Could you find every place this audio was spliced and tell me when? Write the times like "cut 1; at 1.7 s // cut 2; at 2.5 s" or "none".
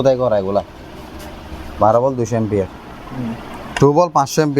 cut 1; at 3.7 s